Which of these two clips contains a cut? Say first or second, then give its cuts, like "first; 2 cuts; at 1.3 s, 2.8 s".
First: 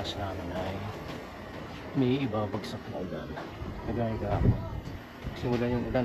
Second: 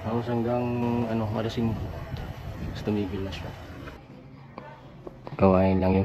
second; 1 cut; at 3.9 s